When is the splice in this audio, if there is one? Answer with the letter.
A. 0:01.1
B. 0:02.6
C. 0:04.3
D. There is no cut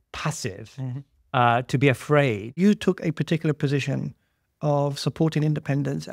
B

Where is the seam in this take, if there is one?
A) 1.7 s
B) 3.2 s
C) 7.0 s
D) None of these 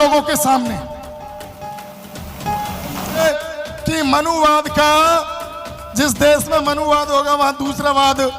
B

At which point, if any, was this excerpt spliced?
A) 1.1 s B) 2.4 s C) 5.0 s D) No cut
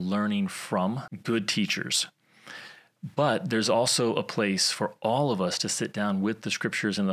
A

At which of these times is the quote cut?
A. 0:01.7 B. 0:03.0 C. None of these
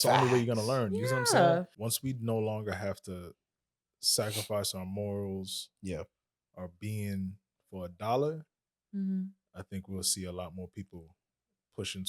A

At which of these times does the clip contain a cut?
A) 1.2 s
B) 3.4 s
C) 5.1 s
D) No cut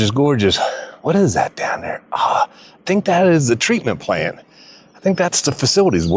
D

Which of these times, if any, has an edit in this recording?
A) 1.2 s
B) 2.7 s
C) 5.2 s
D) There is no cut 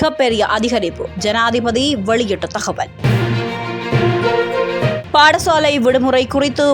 D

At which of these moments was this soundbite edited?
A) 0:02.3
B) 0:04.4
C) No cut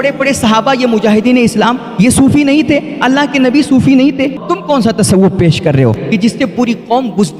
B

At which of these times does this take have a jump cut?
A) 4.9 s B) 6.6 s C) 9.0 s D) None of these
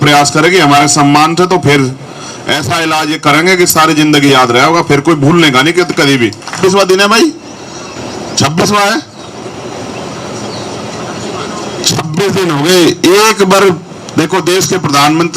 B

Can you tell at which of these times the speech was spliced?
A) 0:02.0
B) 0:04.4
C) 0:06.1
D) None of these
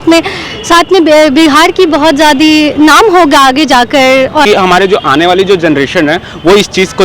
B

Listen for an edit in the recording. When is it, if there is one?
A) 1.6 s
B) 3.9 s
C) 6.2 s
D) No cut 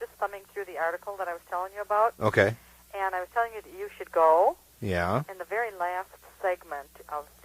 B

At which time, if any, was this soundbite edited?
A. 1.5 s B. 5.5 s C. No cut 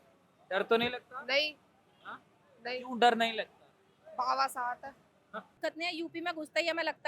B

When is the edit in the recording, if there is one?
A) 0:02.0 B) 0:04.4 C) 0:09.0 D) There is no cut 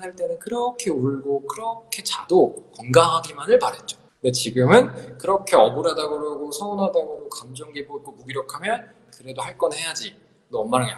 D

